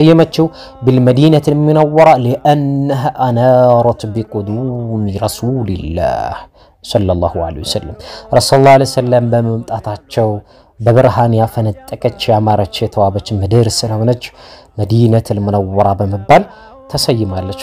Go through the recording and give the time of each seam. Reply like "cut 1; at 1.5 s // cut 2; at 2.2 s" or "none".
none